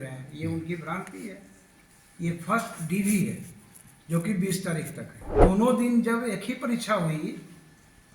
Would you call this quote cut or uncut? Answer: cut